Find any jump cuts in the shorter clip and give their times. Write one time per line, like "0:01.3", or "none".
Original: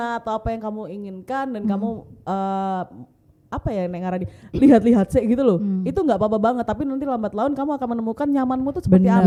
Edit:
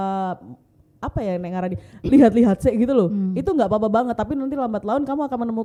none